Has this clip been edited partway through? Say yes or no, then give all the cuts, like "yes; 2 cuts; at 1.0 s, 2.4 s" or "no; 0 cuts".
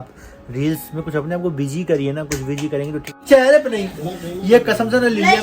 yes; 1 cut; at 3.1 s